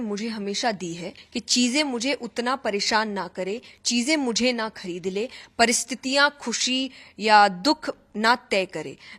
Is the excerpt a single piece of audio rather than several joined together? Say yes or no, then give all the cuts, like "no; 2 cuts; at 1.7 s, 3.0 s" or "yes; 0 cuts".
no; 1 cut; at 1.2 s